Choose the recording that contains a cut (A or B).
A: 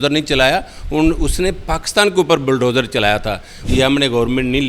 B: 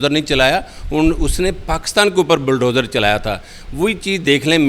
A